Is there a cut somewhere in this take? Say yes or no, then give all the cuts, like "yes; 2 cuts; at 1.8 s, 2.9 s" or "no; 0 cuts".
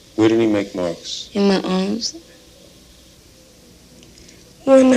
yes; 1 cut; at 2.1 s